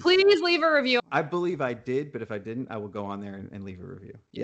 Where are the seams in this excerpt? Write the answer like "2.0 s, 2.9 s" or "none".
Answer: 1.0 s